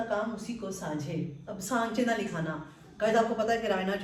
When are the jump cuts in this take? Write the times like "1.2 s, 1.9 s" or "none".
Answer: none